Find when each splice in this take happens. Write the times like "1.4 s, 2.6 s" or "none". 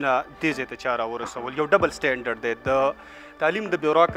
none

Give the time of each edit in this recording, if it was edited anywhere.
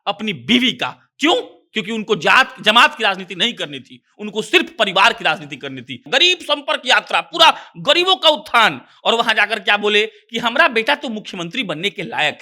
6.1 s

